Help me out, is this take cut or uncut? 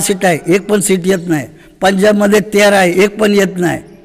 uncut